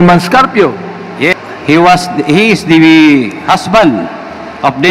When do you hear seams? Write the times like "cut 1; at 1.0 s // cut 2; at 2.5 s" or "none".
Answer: cut 1; at 1.4 s